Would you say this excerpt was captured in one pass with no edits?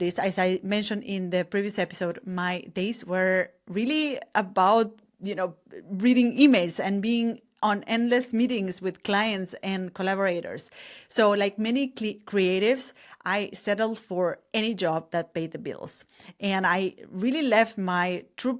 yes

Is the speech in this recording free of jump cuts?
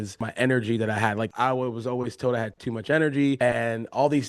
no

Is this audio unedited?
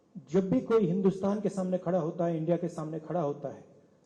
yes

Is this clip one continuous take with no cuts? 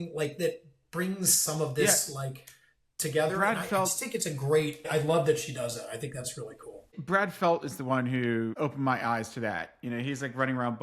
no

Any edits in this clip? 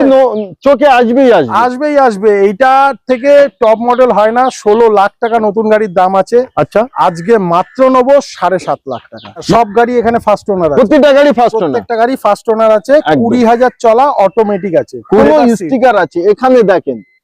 yes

